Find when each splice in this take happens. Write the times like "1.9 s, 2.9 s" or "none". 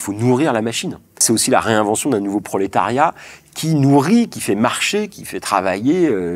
1.2 s